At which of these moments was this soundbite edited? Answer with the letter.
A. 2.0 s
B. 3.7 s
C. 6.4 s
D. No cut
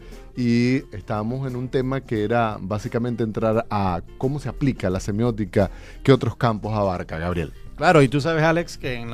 C